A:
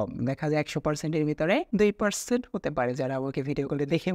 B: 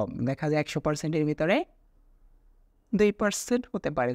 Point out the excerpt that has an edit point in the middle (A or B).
A